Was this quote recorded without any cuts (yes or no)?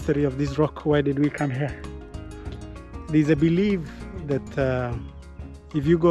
yes